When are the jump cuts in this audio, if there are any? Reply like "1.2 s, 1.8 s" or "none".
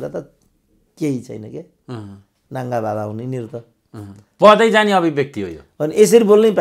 none